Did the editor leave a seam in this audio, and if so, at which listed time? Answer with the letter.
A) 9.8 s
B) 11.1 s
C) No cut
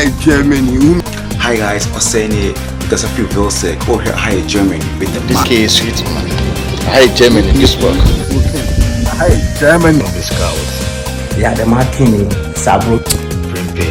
C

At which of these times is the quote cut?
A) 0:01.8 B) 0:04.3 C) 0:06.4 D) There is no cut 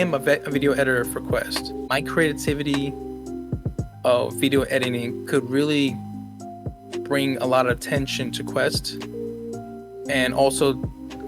A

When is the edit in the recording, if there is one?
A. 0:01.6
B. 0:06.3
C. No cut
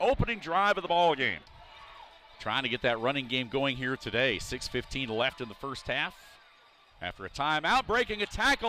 A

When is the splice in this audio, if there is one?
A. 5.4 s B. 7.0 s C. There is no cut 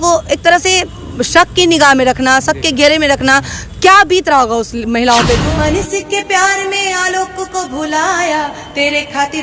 A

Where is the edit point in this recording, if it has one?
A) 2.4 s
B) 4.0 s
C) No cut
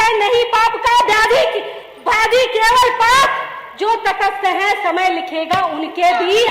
C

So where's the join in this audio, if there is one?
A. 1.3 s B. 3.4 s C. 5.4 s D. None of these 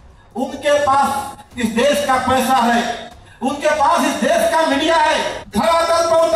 C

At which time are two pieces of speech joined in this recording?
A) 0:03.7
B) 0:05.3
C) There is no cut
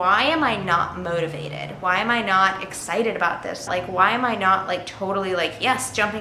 A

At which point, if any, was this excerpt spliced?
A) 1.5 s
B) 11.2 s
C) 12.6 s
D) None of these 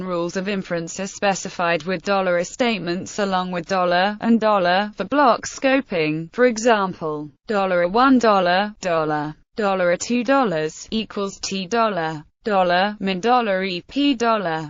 D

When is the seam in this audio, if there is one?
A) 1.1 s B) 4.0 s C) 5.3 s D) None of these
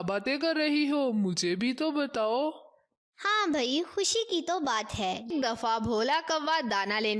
C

